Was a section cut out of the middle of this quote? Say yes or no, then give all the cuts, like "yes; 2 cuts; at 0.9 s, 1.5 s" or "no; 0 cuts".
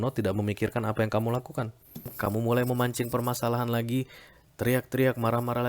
yes; 1 cut; at 2.1 s